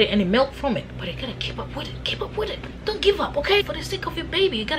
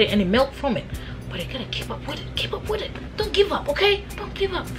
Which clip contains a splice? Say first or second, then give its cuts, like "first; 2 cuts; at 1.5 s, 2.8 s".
first; 2 cuts; at 0.9 s, 3.6 s